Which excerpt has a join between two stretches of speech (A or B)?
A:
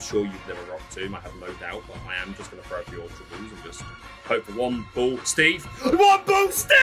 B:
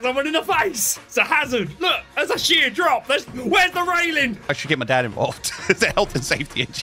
B